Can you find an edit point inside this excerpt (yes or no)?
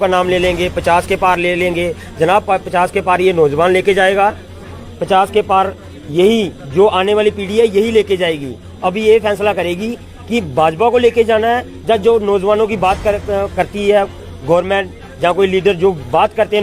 no